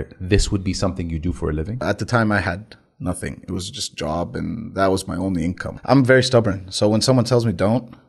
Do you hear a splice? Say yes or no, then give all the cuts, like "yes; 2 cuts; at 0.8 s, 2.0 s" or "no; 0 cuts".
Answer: yes; 2 cuts; at 1.8 s, 5.7 s